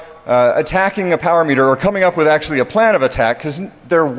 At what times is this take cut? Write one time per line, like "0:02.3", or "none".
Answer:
0:01.0